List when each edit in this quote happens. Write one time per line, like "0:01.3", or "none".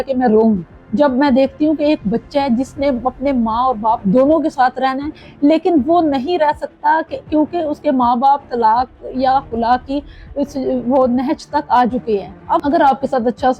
0:12.6